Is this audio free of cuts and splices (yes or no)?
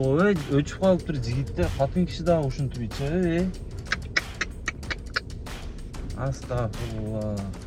yes